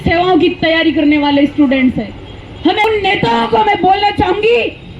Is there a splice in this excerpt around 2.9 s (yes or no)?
yes